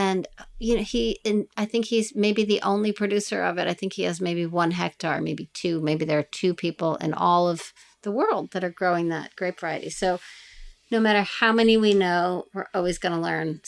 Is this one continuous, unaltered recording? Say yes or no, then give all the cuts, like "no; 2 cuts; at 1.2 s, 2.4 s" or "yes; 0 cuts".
yes; 0 cuts